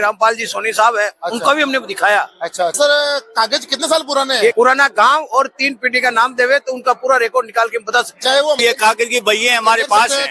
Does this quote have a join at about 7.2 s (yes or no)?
no